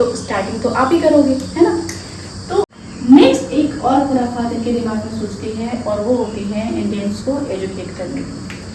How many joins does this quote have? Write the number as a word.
one